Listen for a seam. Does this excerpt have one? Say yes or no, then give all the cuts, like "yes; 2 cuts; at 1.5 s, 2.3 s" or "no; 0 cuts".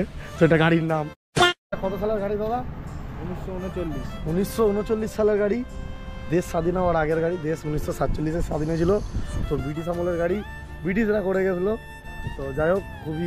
yes; 1 cut; at 1.8 s